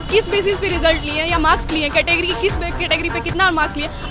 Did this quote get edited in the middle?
no; 0 cuts

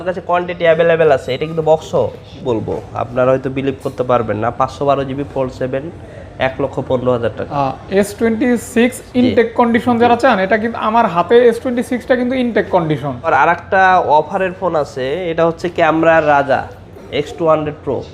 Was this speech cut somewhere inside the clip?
yes; 3 cuts; at 2.3 s, 7.6 s, 13.3 s

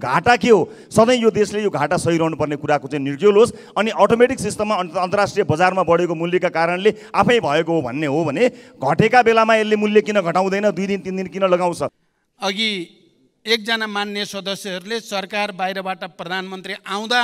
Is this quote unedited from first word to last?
no; 1 cut; at 12.0 s

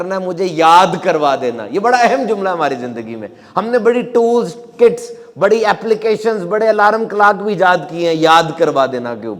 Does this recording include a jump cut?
no; 0 cuts

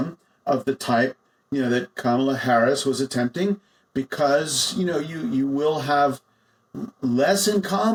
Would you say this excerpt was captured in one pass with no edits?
yes; 0 cuts

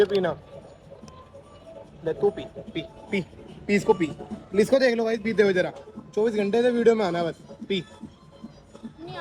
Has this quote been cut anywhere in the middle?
no; 0 cuts

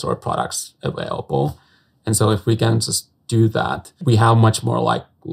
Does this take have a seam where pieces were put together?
yes; 1 cut; at 3.9 s

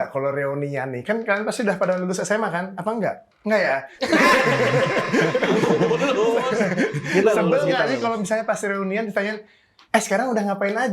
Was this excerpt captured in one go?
yes; 0 cuts

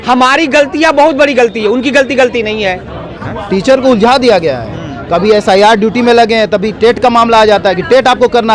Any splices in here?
yes; 1 cut; at 3.3 s

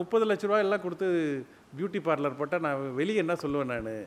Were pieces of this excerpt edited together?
no; 0 cuts

